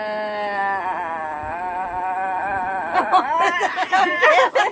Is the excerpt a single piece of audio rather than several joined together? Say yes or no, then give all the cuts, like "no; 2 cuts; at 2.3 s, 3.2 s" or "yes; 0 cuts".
yes; 0 cuts